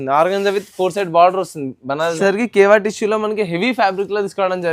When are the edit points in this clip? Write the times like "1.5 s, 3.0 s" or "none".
2.1 s